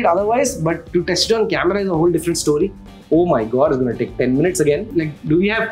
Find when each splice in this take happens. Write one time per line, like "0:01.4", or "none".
0:02.9
0:04.9